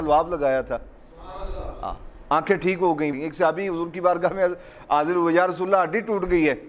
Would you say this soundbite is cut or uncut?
cut